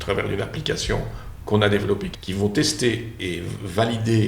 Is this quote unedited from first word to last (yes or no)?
no